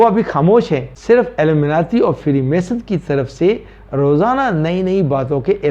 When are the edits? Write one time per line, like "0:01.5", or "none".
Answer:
0:00.9